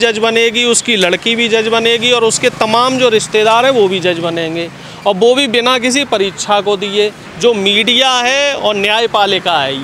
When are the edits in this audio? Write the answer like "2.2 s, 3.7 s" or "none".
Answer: 7.2 s